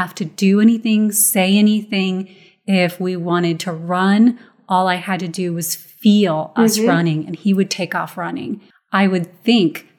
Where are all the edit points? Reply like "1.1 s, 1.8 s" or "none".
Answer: 8.6 s

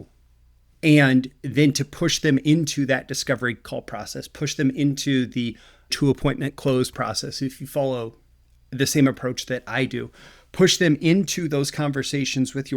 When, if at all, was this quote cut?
5.9 s

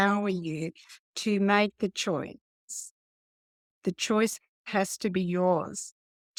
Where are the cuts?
none

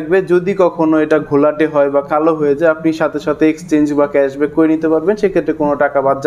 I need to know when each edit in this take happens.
none

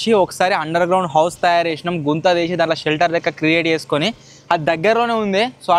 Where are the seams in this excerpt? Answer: none

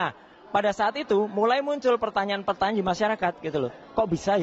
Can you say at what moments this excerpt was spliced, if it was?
none

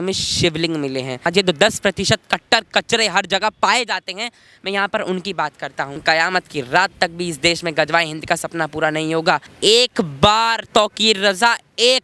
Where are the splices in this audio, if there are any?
1.3 s, 6.0 s, 9.5 s

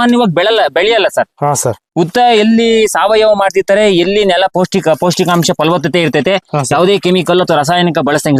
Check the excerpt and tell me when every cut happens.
none

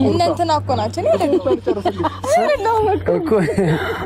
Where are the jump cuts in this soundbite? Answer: none

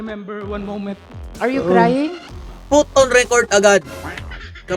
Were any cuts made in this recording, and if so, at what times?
2.5 s

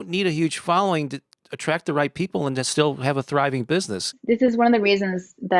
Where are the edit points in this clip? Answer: 1.3 s, 4.2 s

